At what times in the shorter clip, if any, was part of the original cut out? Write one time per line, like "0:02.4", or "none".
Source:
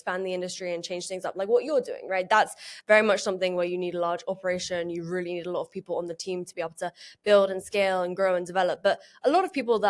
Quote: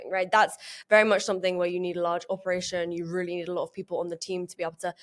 none